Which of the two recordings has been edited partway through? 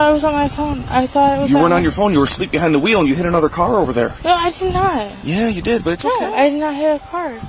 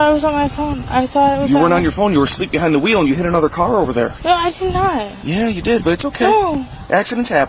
first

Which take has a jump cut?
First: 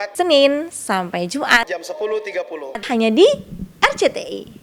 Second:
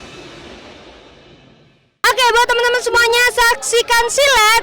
second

